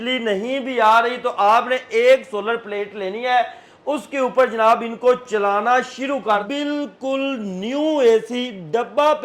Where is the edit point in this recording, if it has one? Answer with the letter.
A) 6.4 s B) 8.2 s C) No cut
A